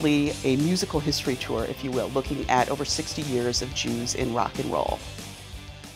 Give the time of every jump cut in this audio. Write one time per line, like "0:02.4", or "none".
0:05.0